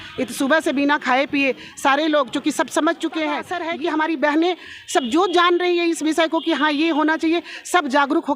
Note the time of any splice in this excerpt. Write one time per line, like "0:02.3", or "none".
0:03.6

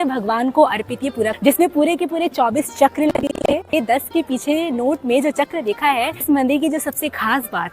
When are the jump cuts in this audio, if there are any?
0:01.4
0:03.7
0:06.2

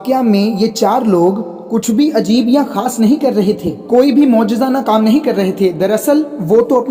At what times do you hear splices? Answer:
0:01.5

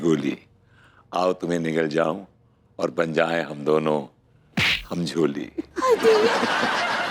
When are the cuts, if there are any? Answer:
none

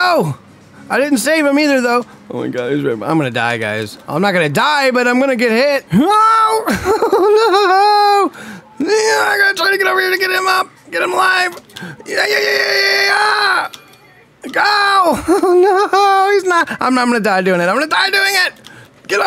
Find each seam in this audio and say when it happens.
0:05.8

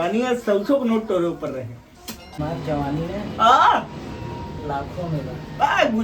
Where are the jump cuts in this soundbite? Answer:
0:02.4

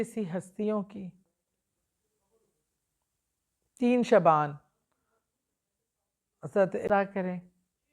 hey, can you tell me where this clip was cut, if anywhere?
0:06.9

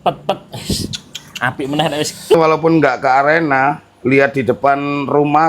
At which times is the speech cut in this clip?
0:02.3

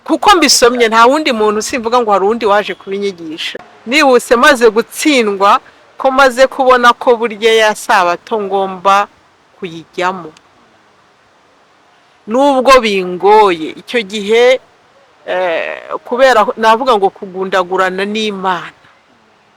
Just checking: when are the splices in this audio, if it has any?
0:03.5

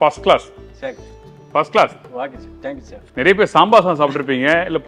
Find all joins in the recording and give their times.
0:03.0

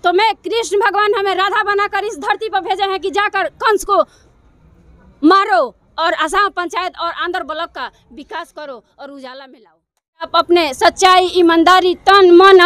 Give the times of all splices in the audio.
0:10.3

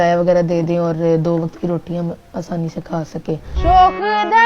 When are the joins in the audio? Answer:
0:03.5

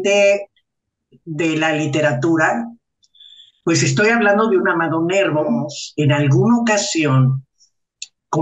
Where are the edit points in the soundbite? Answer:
0:05.8

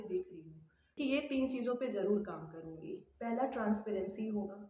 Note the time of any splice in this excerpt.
0:00.9

